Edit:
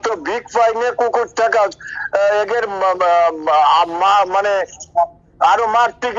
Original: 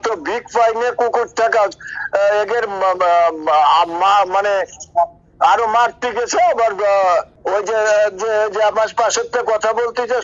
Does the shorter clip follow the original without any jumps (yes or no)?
yes